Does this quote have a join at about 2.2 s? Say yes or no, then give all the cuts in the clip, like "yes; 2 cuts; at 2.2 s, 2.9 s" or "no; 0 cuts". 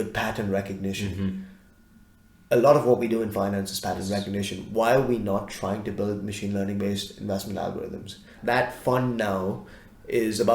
no; 1 cut; at 8.3 s